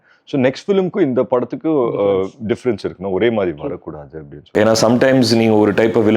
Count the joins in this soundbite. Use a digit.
1